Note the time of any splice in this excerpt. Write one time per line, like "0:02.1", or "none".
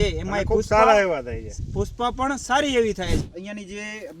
0:03.3